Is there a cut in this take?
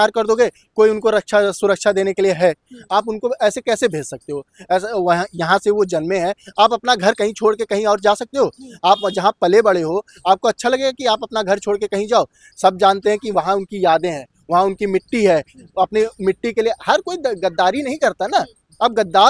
no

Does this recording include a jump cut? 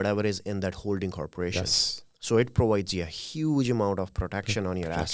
no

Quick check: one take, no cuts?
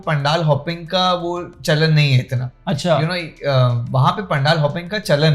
yes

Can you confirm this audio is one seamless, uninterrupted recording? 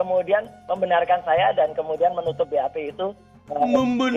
yes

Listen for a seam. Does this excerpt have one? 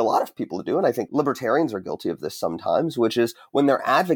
yes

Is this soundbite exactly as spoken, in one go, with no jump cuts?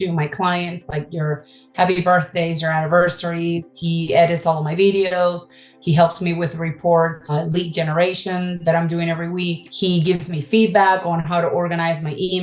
no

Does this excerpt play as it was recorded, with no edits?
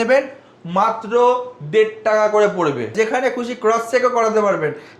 no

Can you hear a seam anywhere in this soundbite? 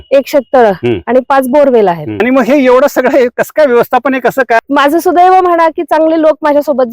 yes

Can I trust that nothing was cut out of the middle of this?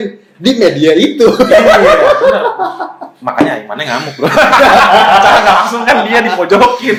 yes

